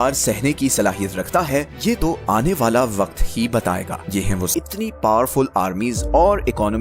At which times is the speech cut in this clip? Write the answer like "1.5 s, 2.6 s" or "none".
4.5 s